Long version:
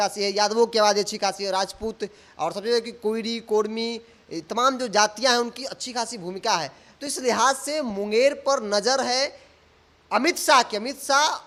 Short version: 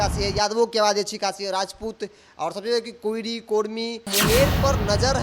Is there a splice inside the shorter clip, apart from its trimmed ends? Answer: yes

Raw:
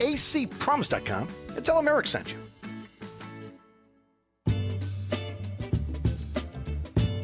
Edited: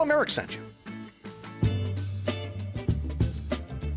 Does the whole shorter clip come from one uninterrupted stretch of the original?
no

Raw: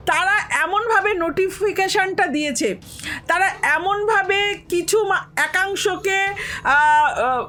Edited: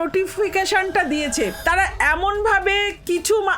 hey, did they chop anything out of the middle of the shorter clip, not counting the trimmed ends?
yes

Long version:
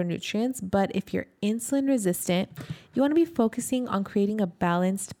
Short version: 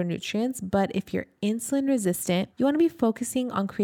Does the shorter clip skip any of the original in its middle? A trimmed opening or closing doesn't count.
yes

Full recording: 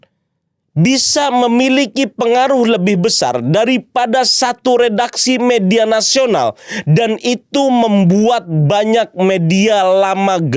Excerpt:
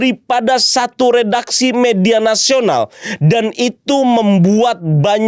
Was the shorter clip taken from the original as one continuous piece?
yes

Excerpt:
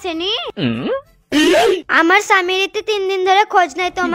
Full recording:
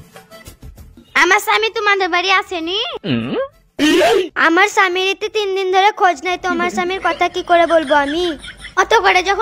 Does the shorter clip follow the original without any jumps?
yes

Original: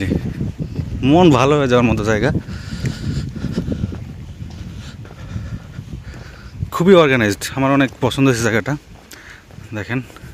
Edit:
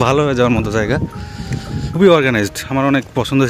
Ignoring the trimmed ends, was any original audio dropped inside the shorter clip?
yes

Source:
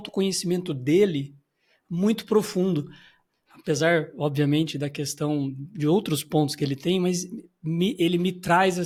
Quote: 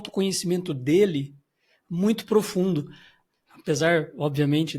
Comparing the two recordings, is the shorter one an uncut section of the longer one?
yes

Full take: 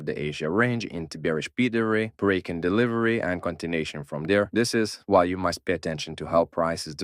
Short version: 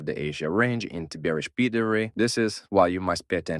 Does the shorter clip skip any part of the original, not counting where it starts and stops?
yes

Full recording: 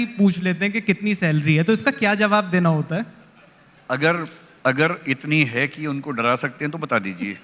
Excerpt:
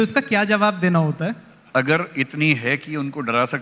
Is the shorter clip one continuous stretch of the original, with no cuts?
no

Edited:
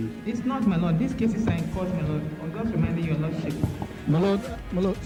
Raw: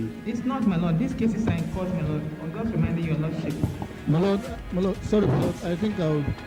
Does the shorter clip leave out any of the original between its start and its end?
no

